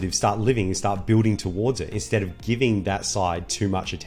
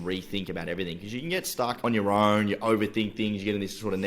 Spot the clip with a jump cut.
second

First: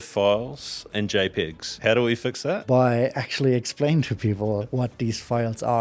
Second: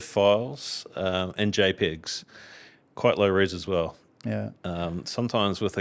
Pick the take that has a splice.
first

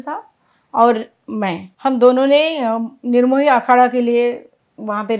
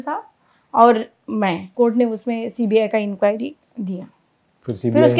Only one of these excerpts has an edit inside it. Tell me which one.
second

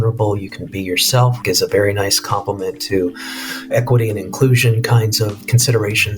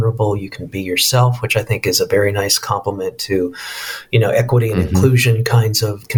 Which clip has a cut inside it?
first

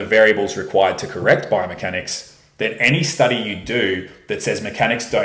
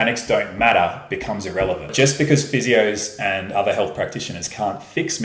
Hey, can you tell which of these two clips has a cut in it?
second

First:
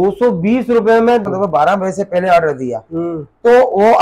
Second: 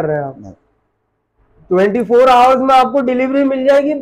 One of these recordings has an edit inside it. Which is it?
first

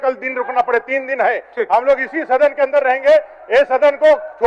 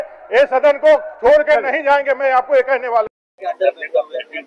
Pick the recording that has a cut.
second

